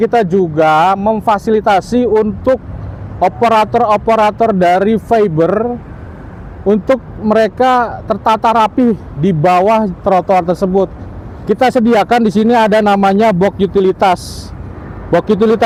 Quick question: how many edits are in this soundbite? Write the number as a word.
zero